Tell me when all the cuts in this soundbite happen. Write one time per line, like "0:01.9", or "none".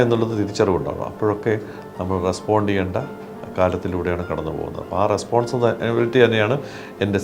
none